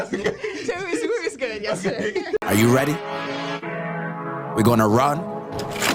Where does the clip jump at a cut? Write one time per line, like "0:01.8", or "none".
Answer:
0:02.4